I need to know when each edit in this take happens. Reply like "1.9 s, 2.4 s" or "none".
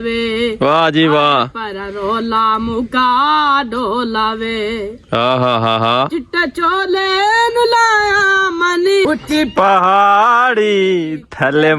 9.1 s